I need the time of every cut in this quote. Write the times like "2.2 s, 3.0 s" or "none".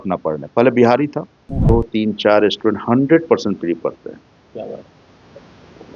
1.5 s